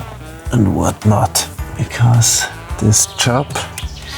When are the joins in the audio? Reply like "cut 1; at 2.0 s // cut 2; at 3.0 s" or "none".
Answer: cut 1; at 1.6 s // cut 2; at 2.7 s